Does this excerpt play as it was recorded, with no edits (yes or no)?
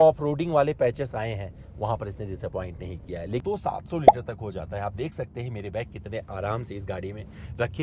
no